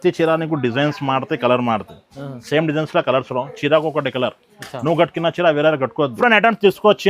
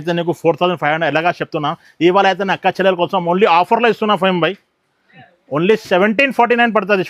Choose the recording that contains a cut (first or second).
first